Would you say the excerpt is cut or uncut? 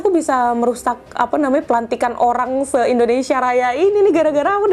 uncut